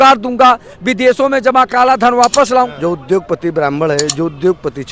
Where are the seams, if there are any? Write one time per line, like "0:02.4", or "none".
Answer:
0:02.7